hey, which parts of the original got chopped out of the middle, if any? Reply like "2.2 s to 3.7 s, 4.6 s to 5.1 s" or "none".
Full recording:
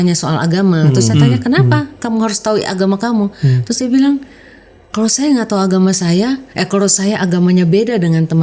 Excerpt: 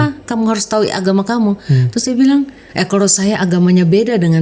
4.4 s to 6.5 s